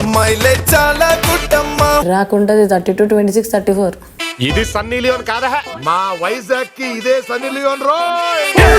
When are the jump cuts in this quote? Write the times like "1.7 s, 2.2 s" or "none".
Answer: 2.1 s